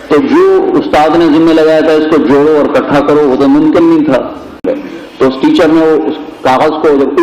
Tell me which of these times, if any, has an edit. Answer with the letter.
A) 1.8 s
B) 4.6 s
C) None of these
B